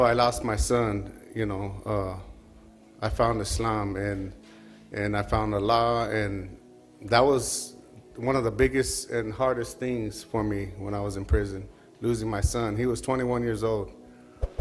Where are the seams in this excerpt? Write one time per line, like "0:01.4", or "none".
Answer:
none